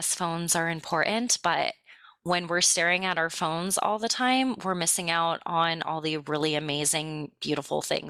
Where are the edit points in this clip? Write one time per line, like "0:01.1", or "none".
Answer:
none